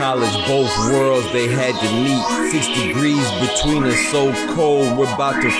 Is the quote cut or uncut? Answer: uncut